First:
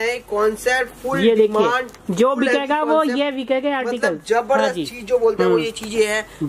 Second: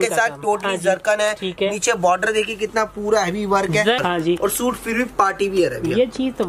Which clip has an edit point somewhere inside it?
second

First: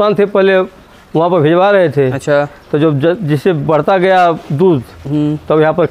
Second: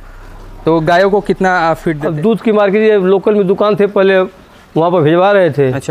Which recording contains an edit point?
second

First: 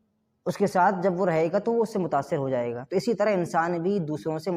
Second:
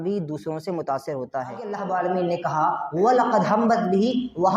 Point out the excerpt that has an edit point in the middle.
second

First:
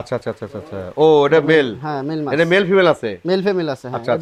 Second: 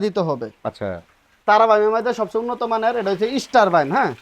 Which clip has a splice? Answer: second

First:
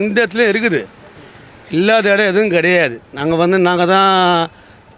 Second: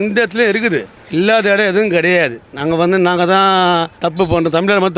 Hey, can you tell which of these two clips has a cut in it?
second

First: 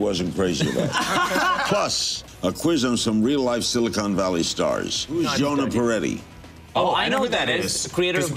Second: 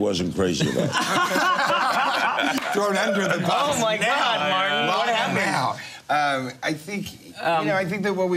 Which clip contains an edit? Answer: first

